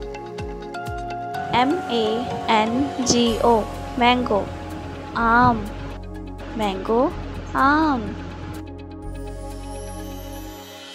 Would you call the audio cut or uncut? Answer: cut